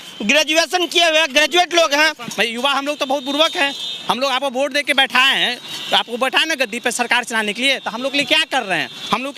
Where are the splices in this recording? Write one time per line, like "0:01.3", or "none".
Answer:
0:02.2